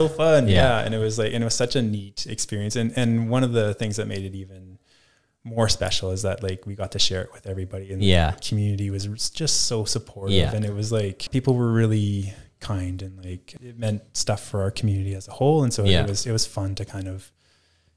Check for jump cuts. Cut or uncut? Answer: cut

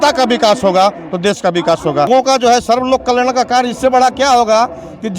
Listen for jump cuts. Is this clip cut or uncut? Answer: cut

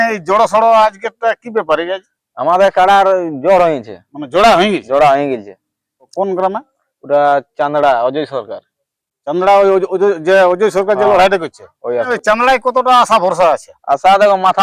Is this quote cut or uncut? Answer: cut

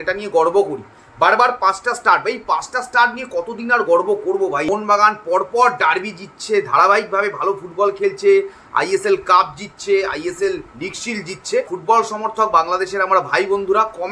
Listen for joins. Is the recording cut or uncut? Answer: cut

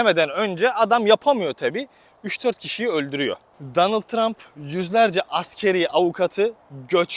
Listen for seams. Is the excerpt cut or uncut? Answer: cut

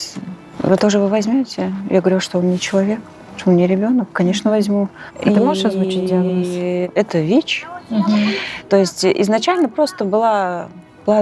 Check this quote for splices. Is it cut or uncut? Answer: cut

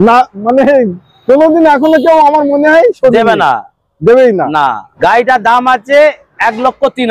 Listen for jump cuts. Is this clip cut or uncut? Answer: cut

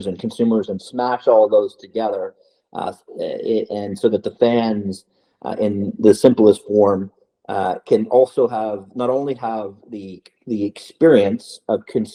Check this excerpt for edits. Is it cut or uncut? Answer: uncut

